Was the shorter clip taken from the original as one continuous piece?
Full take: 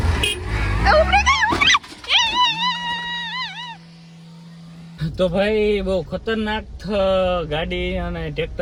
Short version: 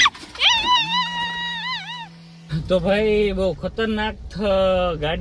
no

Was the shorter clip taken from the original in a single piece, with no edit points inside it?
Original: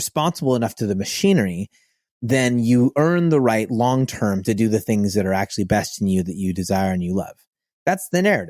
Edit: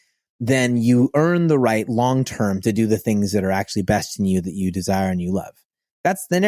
yes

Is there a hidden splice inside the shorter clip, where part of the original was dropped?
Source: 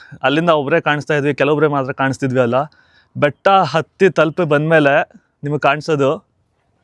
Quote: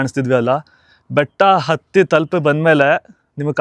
no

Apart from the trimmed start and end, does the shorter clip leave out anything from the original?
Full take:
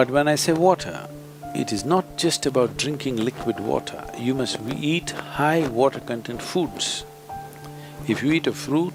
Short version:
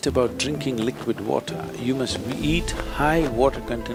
no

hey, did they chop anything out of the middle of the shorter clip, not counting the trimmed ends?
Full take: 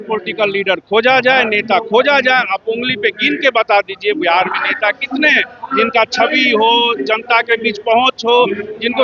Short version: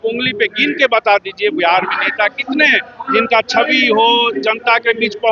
no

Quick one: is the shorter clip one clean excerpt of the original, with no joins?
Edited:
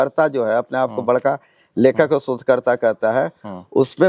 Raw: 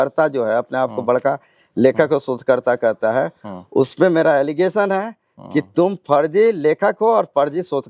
yes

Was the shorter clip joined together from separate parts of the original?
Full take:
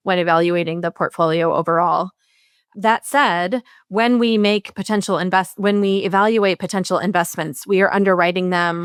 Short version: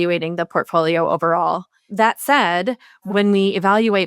yes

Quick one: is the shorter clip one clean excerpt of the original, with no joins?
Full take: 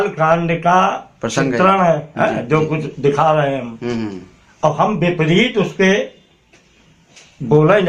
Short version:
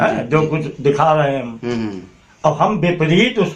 yes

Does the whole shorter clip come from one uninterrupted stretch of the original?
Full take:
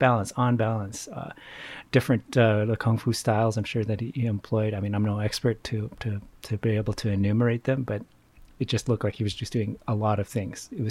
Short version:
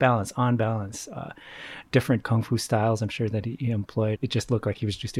no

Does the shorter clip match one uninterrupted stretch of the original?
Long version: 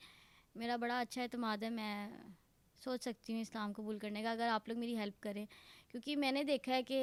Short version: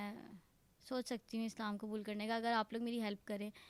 yes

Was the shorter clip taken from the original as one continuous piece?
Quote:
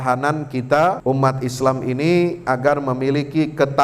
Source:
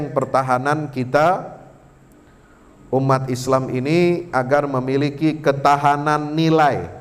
no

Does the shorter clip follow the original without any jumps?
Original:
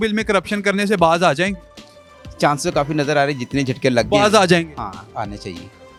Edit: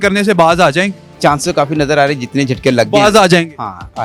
no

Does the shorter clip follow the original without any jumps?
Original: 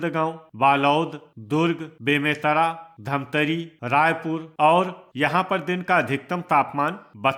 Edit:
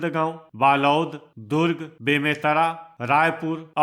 no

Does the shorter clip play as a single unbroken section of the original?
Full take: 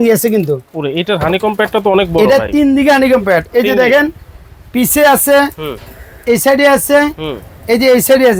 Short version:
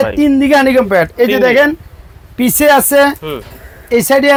yes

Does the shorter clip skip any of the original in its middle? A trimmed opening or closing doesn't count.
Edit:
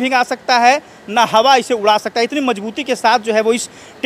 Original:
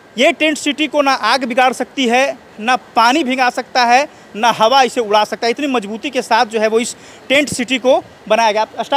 no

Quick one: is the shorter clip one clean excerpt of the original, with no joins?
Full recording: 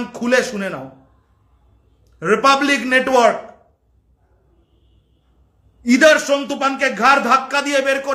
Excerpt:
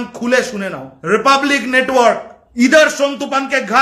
no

